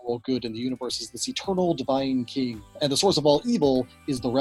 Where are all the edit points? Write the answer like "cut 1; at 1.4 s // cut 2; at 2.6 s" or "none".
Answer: cut 1; at 2.7 s